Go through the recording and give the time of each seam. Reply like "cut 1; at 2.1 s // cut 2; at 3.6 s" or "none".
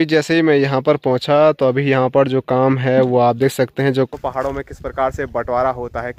cut 1; at 4.1 s